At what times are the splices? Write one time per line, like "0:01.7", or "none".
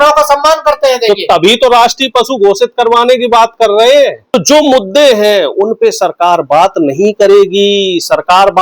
0:04.2